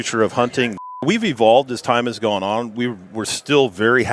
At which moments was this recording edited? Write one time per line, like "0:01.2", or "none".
0:01.0